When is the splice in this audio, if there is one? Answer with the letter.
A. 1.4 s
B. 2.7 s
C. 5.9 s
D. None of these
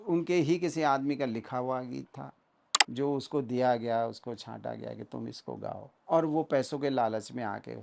C